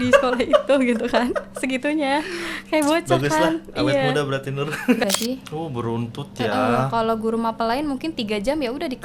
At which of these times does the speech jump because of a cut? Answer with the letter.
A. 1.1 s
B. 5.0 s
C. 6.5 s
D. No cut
B